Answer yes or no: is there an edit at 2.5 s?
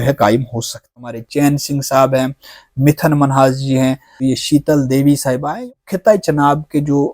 no